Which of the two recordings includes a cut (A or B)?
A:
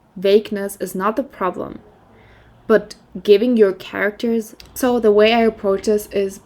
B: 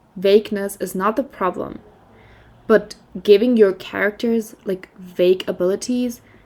A